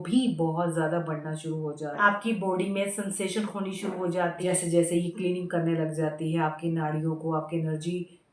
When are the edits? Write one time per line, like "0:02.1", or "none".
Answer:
0:02.0
0:04.5